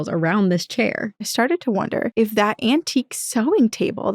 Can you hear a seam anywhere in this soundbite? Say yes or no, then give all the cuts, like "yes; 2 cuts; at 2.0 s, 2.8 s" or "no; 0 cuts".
yes; 2 cuts; at 1.3 s, 2.1 s